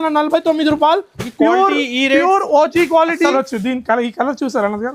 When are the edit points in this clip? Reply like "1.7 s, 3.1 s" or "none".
3.3 s